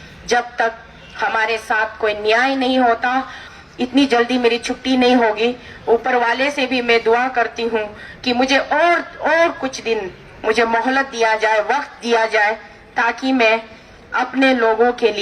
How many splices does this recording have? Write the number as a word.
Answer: one